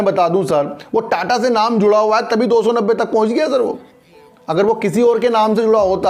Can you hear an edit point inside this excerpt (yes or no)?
no